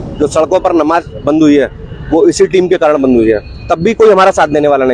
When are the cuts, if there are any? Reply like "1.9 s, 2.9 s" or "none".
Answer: none